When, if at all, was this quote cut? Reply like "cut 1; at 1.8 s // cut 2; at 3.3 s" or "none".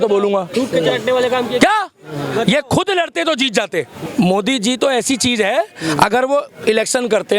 cut 1; at 4.0 s